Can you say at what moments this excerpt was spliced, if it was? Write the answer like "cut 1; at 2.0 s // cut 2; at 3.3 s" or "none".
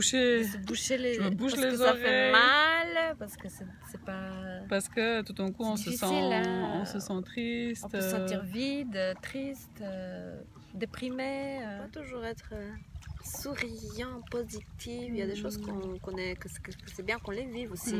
cut 1; at 11.9 s